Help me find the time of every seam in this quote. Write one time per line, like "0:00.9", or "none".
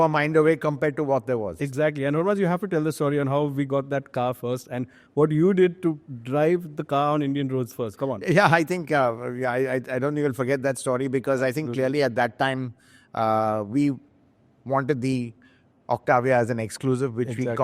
none